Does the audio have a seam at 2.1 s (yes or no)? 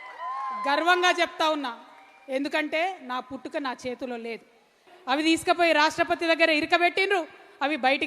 no